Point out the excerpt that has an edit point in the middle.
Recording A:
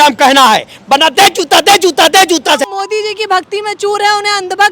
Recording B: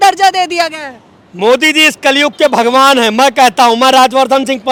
A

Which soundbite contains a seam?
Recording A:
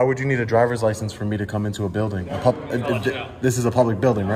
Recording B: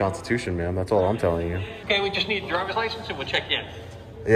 B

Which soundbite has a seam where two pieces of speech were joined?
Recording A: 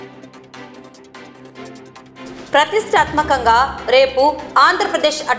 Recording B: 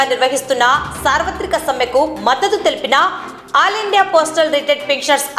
A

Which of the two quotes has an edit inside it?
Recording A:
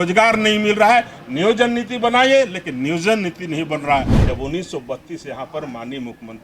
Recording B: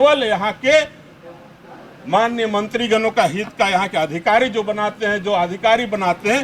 A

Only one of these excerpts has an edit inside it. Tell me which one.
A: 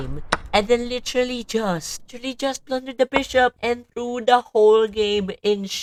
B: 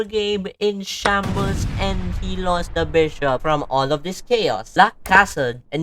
B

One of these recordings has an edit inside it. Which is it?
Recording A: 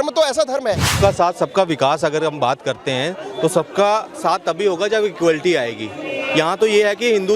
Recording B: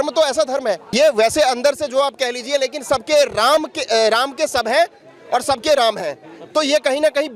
A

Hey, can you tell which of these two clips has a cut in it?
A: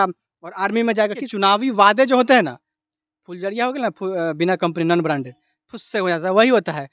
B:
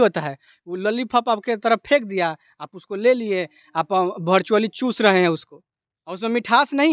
A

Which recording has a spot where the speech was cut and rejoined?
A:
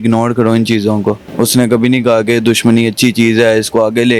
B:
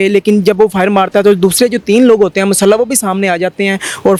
A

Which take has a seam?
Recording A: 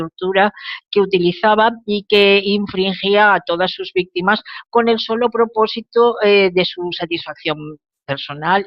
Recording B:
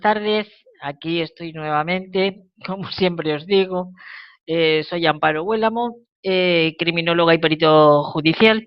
A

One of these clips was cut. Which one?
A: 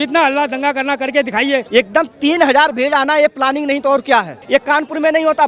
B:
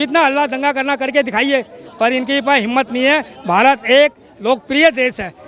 A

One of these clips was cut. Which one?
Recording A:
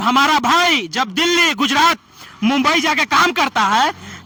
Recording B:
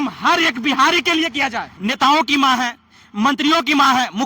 B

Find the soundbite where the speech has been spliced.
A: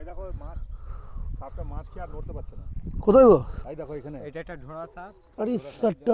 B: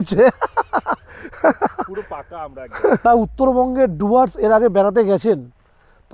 B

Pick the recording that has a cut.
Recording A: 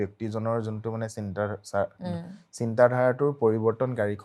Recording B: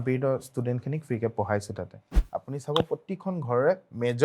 B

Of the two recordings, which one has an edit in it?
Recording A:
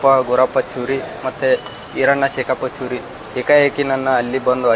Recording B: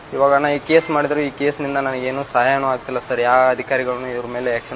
B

